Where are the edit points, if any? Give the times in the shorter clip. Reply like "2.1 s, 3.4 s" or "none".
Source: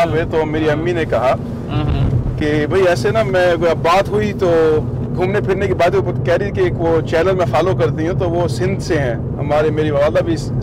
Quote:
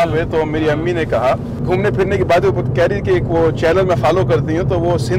1.5 s